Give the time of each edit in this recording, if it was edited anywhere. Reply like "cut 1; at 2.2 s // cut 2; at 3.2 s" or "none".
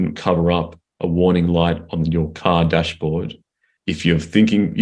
cut 1; at 3.7 s